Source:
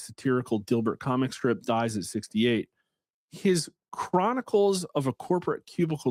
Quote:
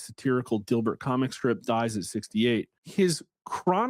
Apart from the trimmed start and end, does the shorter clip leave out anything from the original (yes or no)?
yes